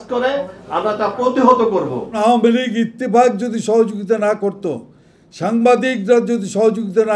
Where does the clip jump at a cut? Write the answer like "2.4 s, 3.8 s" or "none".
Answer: 2.2 s